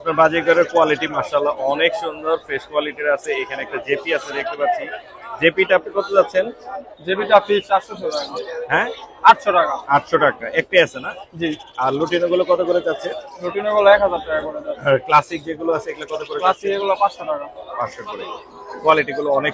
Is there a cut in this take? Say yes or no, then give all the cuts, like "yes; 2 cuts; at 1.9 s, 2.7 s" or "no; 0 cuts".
no; 0 cuts